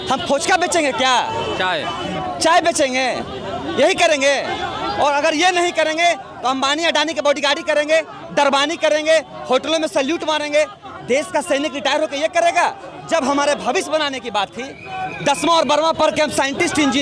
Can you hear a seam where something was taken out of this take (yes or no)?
no